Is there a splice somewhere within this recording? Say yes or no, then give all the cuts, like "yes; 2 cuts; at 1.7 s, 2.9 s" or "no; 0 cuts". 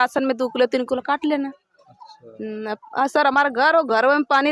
no; 0 cuts